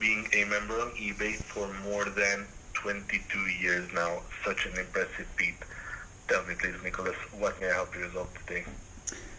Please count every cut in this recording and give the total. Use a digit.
0